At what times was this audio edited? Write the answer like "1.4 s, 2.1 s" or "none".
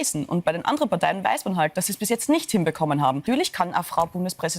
3.2 s